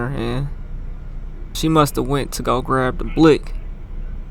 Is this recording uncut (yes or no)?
no